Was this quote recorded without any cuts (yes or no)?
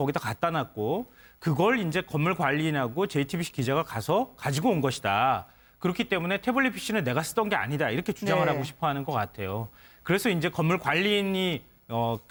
yes